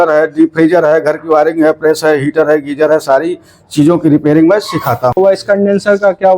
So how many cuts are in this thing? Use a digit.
1